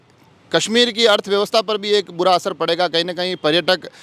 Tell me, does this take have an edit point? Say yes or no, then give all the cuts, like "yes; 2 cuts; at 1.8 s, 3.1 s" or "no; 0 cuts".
no; 0 cuts